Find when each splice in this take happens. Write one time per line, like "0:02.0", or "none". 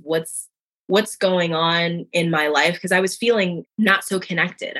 0:03.6